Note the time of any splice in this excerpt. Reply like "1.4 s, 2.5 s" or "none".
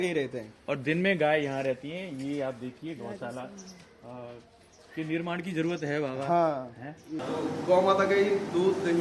7.2 s